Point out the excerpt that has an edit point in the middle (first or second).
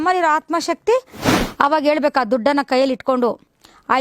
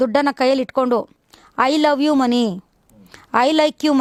first